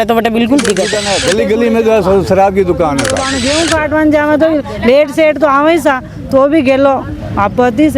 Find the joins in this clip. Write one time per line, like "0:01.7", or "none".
0:01.1
0:03.3